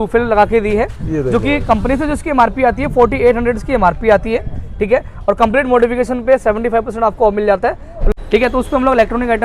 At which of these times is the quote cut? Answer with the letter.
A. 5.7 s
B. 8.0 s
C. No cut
B